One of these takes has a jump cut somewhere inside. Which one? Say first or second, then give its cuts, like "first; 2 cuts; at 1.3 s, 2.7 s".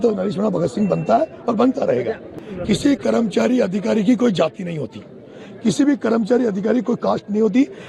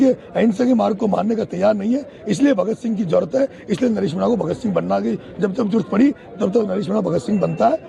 first; 1 cut; at 2.3 s